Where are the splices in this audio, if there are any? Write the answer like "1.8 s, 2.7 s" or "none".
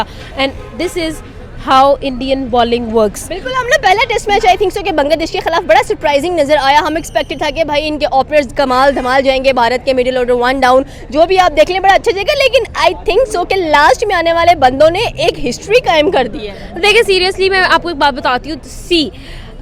none